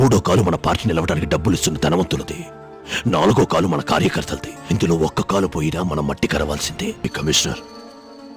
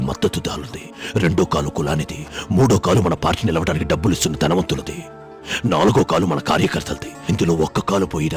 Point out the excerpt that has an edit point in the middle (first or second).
first